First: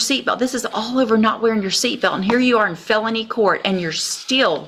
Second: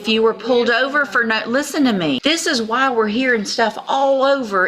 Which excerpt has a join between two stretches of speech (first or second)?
second